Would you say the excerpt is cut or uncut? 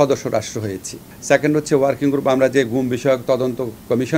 cut